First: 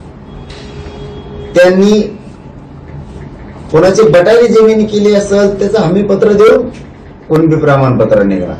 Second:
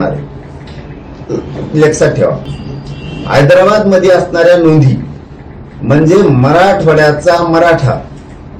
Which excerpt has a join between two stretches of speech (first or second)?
second